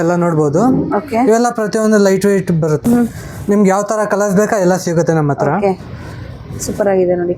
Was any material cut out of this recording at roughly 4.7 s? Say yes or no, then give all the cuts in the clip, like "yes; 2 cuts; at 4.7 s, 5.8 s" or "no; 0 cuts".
no; 1 cut; at 2.9 s